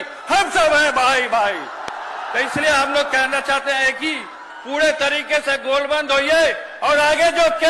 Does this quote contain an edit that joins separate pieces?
no; 0 cuts

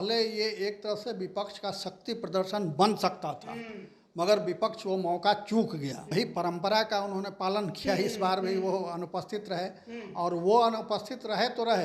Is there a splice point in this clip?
yes; 1 cut; at 6.1 s

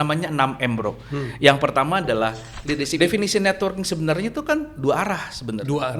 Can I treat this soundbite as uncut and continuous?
no; 1 cut; at 3.0 s

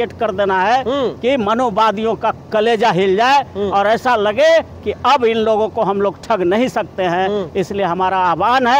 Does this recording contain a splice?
no; 0 cuts

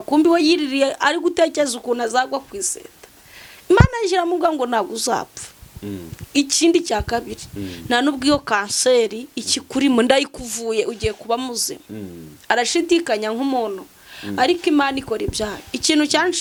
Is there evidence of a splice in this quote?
no; 0 cuts

